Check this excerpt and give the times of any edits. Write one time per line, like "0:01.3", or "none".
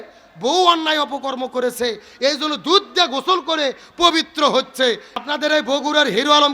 0:05.1